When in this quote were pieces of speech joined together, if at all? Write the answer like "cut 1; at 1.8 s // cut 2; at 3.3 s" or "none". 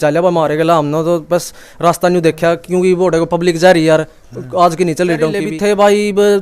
cut 1; at 5.5 s